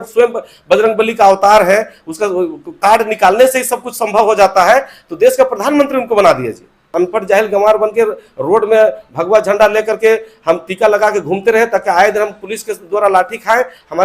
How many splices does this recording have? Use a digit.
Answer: 1